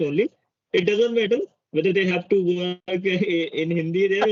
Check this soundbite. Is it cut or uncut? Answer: uncut